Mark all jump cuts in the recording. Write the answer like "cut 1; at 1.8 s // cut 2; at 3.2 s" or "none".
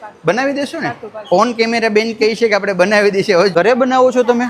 cut 1; at 3.5 s

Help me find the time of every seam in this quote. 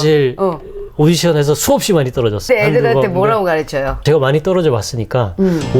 cut 1; at 2.4 s // cut 2; at 4.0 s

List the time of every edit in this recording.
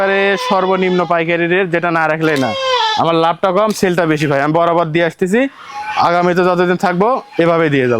none

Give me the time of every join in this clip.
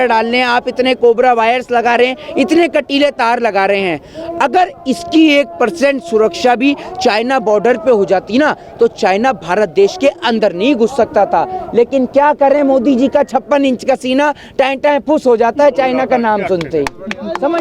none

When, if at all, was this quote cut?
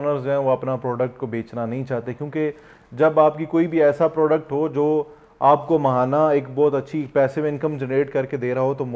none

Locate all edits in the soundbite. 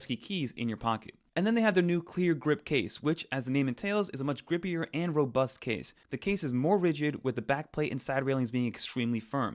cut 1; at 1.2 s

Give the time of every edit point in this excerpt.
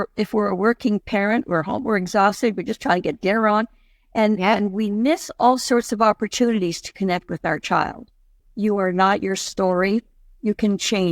cut 1; at 8.4 s

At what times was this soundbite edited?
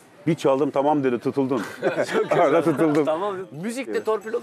none

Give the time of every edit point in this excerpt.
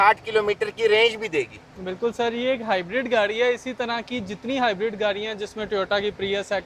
none

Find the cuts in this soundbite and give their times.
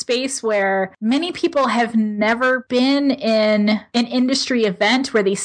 cut 1; at 0.9 s // cut 2; at 2.6 s // cut 3; at 3.9 s

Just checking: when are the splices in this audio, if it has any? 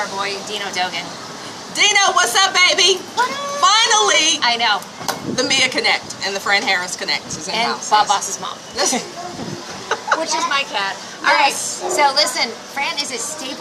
cut 1; at 9.1 s

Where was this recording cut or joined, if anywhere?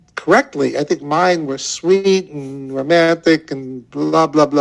none

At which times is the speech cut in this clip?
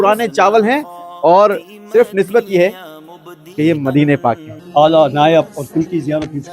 cut 1; at 4.5 s

